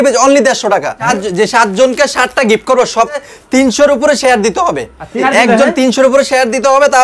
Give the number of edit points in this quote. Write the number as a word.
three